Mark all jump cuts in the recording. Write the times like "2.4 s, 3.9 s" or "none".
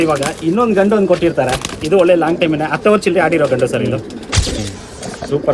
4.6 s